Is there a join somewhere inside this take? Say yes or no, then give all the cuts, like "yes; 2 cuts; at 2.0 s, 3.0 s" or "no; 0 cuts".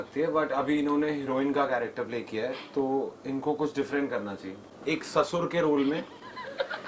yes; 1 cut; at 4.7 s